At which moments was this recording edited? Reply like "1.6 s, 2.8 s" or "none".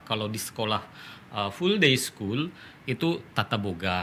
none